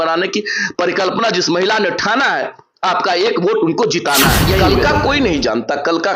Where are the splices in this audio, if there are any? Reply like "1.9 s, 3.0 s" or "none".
4.6 s